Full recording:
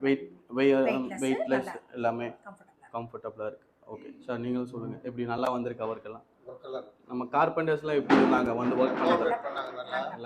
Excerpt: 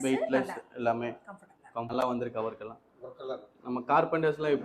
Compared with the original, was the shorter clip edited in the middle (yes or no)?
yes